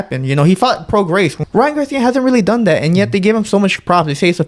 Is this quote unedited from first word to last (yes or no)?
no